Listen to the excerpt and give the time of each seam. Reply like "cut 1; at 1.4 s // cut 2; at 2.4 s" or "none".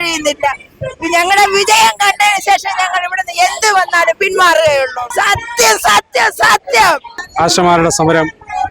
cut 1; at 5.0 s // cut 2; at 7.1 s